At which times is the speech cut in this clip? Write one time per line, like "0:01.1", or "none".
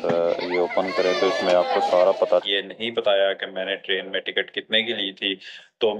0:02.4